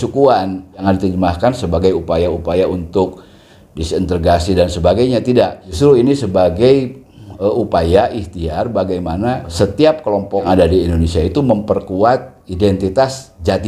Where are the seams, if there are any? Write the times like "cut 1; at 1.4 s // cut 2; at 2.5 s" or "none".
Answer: cut 1; at 0.8 s // cut 2; at 5.6 s // cut 3; at 9.5 s // cut 4; at 10.4 s